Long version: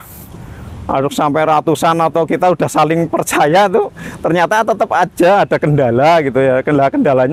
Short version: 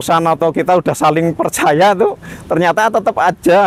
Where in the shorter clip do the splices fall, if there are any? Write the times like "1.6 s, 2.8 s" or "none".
none